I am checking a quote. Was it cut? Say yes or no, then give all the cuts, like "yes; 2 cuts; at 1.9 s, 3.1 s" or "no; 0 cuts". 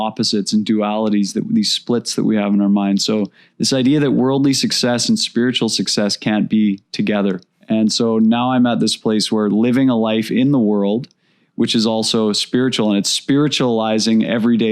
yes; 1 cut; at 7.5 s